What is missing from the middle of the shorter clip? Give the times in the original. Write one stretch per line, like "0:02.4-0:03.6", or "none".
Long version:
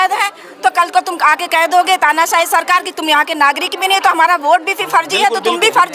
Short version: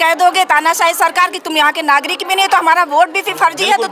none